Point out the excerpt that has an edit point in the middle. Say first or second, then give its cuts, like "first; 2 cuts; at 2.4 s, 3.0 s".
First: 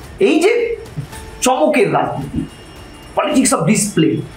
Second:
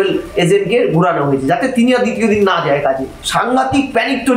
second; 1 cut; at 3.2 s